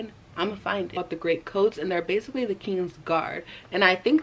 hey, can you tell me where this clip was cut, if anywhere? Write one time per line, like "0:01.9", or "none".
0:01.0